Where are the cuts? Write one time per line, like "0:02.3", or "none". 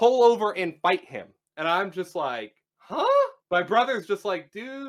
none